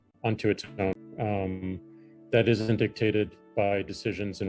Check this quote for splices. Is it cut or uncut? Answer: cut